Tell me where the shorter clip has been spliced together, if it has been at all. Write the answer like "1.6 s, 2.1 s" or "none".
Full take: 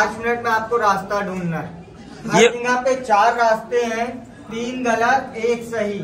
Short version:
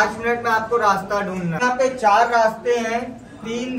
1.6 s